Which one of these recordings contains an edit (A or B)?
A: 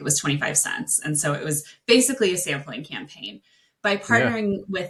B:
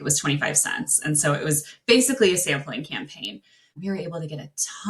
B